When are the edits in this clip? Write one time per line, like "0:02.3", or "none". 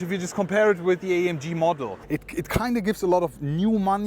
0:01.9